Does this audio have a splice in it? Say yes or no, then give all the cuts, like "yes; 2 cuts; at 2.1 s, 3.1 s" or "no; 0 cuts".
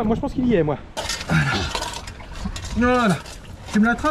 yes; 1 cut; at 0.9 s